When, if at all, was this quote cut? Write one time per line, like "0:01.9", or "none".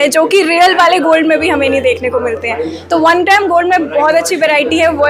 none